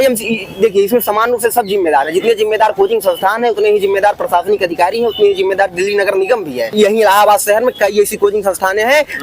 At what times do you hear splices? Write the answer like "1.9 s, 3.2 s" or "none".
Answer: 6.7 s